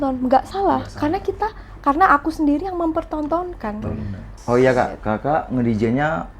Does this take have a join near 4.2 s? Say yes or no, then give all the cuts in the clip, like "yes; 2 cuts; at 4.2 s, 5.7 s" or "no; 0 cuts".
yes; 1 cut; at 4.2 s